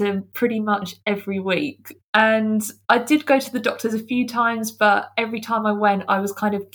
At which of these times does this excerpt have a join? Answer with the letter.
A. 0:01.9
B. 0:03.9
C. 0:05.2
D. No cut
A